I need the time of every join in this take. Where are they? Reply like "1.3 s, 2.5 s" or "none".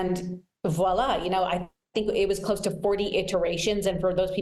none